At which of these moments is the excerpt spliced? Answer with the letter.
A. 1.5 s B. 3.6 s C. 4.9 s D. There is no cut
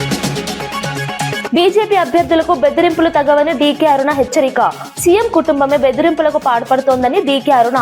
A